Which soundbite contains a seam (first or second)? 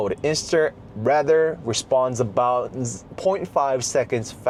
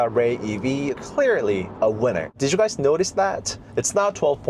second